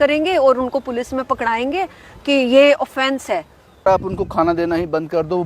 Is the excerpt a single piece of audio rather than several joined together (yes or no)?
no